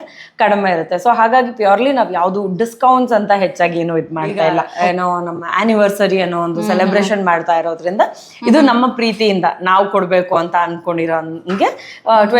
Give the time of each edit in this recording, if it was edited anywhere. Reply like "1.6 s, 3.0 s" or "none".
4.7 s